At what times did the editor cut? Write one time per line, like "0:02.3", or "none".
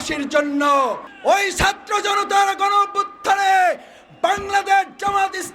0:01.1